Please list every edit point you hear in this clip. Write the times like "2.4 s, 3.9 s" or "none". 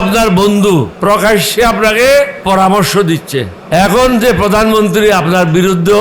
0.9 s, 2.4 s, 3.6 s